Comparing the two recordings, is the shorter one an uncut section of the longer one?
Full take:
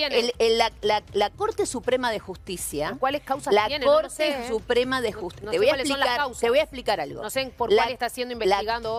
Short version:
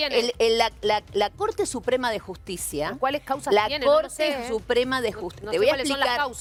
yes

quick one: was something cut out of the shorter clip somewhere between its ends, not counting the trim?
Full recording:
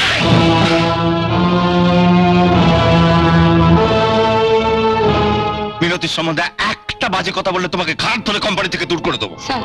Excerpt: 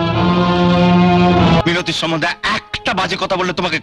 yes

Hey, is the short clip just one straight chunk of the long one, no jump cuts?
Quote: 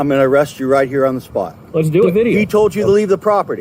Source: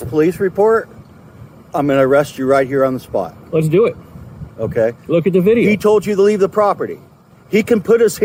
no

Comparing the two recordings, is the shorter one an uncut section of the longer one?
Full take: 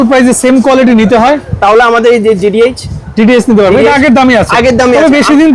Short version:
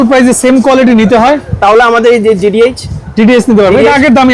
yes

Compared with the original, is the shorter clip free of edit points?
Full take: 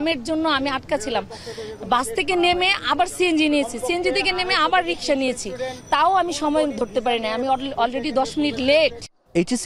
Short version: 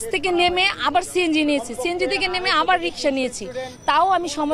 yes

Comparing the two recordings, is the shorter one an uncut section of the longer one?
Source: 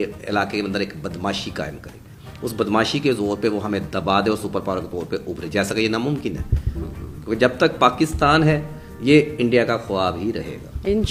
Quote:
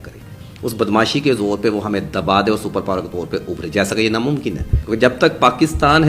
no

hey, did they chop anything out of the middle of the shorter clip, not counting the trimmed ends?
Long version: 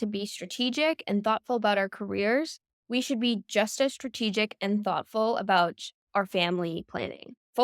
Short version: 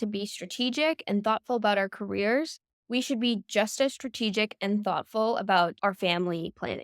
yes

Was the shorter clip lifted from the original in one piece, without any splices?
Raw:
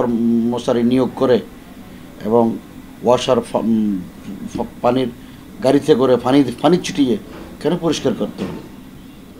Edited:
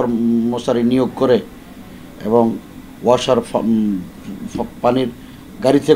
yes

